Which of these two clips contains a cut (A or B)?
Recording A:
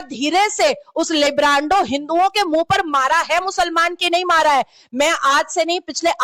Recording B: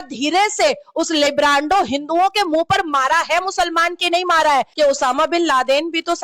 B